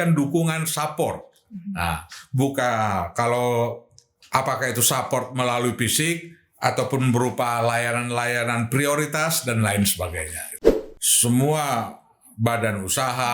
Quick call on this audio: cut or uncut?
cut